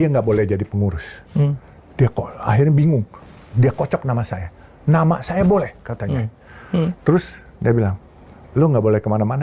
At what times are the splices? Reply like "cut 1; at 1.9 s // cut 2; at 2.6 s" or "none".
none